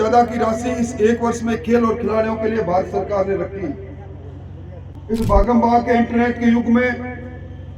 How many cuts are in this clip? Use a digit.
1